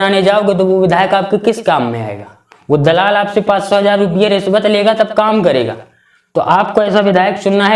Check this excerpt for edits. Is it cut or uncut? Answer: uncut